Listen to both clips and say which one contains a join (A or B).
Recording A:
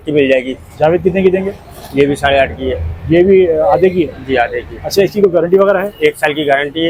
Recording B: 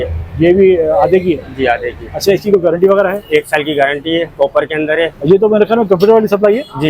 B